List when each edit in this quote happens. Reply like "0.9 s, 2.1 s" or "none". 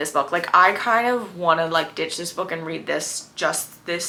none